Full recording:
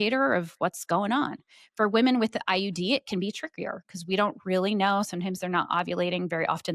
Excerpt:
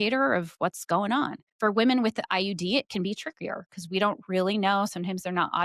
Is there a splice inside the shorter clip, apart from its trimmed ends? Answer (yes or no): yes